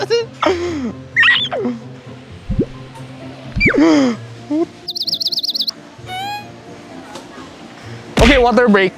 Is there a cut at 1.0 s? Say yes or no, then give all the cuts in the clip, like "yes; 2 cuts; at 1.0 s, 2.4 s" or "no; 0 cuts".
no; 0 cuts